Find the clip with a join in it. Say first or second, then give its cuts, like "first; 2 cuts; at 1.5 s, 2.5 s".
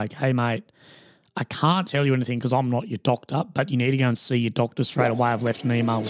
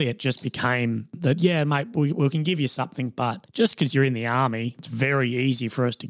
second; 3 cuts; at 1.5 s, 3.4 s, 4.9 s